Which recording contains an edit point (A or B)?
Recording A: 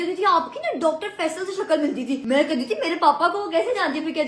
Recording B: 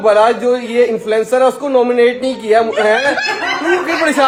A